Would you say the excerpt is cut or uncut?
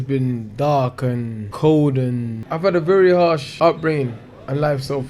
cut